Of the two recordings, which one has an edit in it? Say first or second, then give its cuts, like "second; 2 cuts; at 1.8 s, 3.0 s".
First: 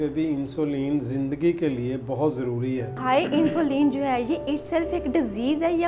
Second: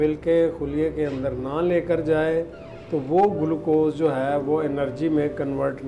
first; 1 cut; at 2.9 s